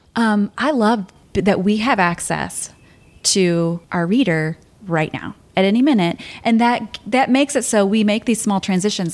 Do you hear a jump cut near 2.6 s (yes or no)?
no